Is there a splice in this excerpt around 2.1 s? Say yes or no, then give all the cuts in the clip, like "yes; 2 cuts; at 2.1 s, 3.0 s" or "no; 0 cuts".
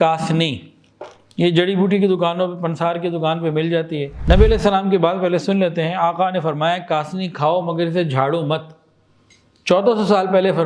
no; 1 cut; at 4.1 s